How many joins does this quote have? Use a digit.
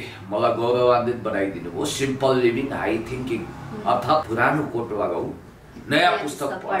1